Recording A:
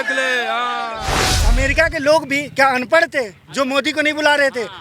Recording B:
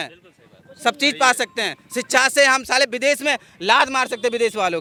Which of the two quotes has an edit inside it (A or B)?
A